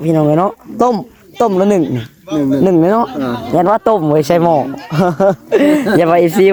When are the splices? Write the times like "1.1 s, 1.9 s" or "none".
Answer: none